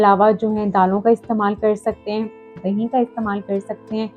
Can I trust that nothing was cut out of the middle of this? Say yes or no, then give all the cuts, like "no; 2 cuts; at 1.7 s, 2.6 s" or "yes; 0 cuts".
no; 1 cut; at 2.5 s